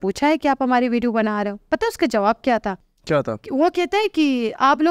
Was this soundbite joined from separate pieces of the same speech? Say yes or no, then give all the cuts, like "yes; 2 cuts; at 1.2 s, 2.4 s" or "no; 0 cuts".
yes; 1 cut; at 2.9 s